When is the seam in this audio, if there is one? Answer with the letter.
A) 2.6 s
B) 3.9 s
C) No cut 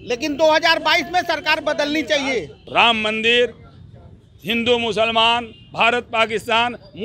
A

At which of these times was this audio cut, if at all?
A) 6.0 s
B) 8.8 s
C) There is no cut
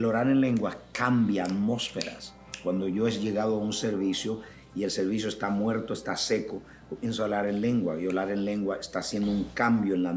C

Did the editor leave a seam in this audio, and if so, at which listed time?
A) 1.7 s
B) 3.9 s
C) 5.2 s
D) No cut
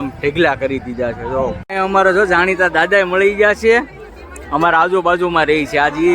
A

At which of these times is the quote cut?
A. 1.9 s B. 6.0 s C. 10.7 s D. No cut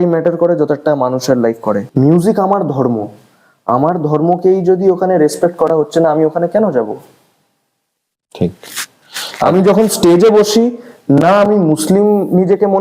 A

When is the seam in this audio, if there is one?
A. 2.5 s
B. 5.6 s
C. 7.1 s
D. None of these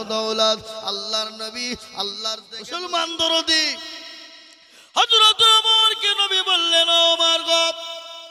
A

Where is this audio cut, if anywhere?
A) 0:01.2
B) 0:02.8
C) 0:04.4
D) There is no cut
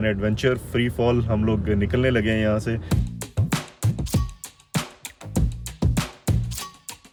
D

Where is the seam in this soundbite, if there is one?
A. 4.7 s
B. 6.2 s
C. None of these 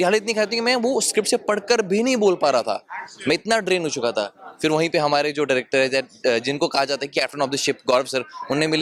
C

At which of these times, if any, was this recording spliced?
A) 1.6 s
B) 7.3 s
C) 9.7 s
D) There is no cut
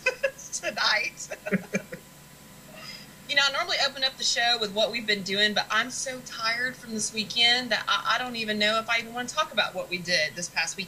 D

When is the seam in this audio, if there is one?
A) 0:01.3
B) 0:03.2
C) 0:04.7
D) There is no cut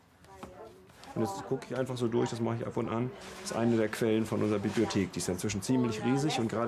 C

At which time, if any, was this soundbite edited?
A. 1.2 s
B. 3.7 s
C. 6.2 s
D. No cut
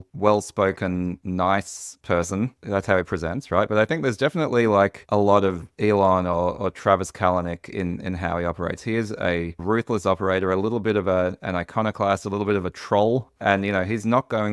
A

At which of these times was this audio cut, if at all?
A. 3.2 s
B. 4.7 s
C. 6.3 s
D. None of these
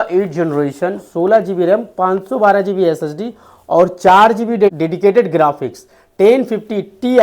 B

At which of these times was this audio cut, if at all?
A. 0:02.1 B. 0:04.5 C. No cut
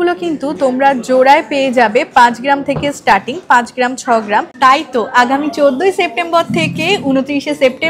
B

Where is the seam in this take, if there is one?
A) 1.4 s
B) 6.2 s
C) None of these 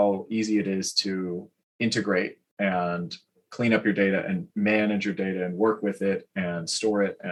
C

